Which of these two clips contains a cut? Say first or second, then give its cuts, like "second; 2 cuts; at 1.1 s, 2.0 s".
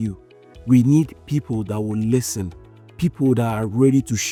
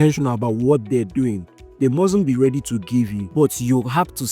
second; 1 cut; at 3.2 s